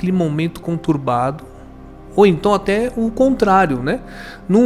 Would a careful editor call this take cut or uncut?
uncut